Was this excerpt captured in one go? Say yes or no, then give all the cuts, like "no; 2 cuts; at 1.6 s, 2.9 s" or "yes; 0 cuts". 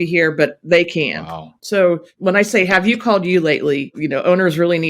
no; 3 cuts; at 1.5 s, 2.1 s, 4.0 s